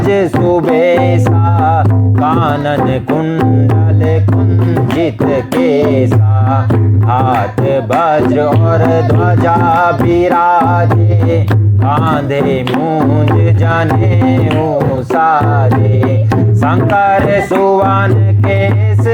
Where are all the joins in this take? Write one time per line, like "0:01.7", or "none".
none